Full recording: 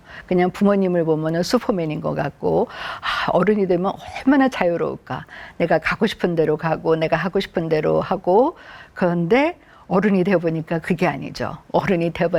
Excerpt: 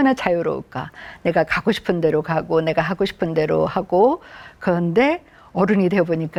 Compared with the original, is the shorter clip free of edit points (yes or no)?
yes